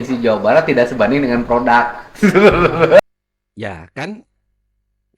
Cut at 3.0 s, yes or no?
yes